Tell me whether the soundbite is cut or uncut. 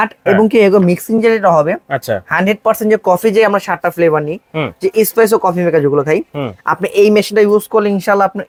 uncut